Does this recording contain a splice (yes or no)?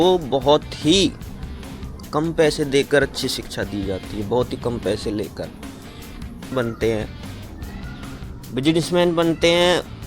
yes